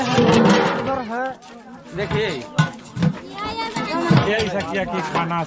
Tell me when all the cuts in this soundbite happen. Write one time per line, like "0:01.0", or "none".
none